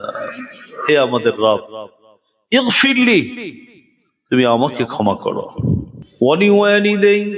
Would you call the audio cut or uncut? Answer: cut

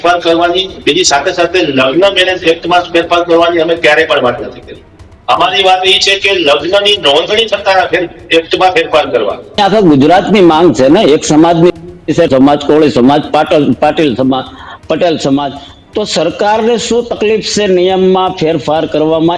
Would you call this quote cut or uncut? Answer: cut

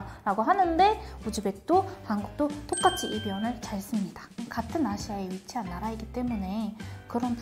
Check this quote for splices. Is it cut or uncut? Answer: cut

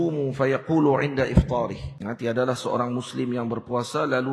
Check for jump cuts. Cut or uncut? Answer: cut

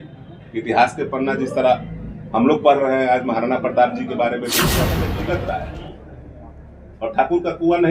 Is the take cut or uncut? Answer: cut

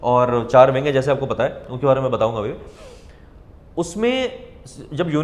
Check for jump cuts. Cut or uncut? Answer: uncut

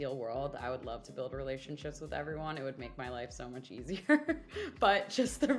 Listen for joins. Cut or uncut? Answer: uncut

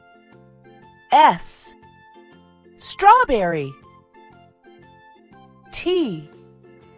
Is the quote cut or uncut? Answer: cut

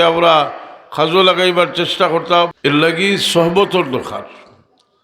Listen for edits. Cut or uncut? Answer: cut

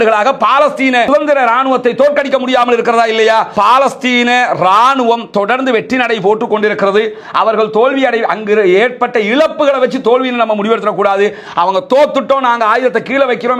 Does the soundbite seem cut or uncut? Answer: cut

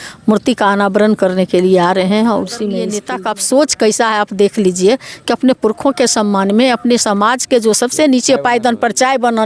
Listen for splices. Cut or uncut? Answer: cut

